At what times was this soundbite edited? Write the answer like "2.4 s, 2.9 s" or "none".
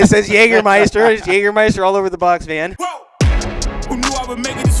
2.8 s